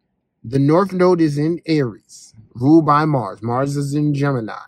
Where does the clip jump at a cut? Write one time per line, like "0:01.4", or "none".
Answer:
none